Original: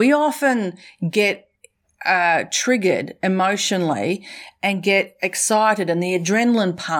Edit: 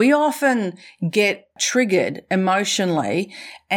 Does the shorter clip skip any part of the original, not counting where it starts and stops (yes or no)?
yes